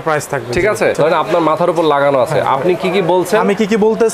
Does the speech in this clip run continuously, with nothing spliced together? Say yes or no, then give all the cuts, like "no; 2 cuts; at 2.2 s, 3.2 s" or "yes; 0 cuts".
no; 1 cut; at 0.9 s